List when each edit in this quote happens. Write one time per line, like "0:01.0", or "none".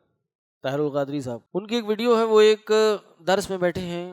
0:01.4